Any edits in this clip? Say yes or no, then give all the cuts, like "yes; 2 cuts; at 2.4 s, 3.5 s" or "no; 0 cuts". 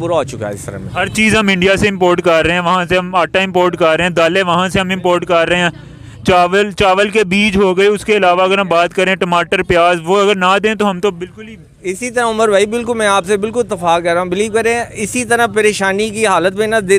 no; 0 cuts